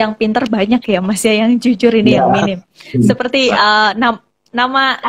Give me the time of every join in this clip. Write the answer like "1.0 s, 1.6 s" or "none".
none